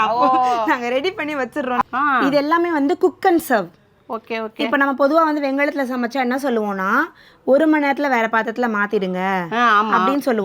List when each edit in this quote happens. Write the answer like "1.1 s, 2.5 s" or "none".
1.8 s